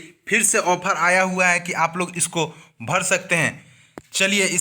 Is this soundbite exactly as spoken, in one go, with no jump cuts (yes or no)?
no